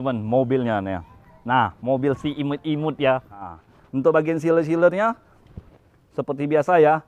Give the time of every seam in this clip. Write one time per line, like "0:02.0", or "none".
0:03.6